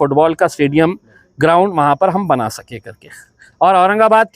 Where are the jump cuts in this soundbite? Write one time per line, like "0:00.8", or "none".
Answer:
none

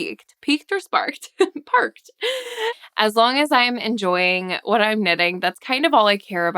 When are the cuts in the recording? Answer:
0:02.7

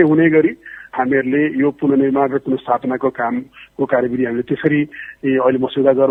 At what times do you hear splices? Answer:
none

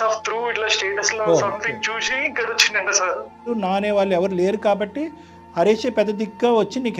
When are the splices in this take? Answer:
0:03.5

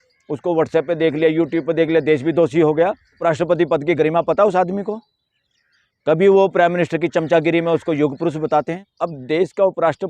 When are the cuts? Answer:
0:03.1
0:08.8

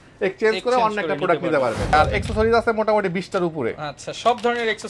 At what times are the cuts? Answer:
0:01.9

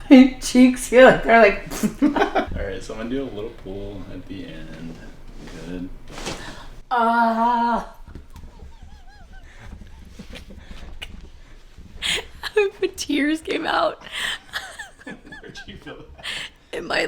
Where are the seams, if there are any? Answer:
0:02.5

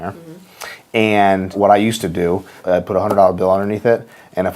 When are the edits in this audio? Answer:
0:01.6
0:02.5

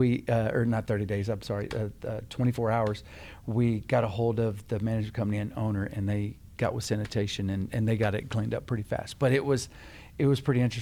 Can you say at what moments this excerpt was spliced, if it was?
none

